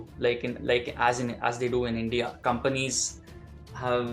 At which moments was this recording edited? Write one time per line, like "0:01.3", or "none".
0:02.3